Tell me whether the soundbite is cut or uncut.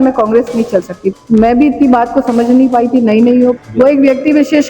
cut